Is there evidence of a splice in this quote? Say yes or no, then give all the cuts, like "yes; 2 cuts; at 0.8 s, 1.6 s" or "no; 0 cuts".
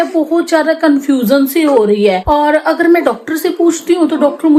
no; 0 cuts